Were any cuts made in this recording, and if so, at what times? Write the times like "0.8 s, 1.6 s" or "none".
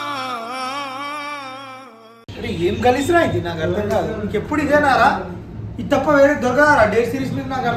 none